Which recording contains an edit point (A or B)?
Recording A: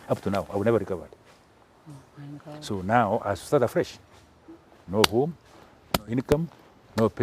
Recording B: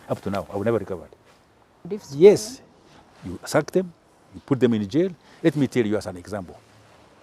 B